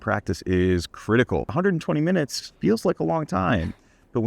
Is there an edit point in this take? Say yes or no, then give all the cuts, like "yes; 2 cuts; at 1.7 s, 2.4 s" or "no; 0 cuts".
yes; 1 cut; at 1.5 s